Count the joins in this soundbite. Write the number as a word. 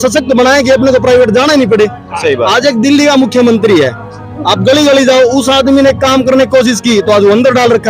zero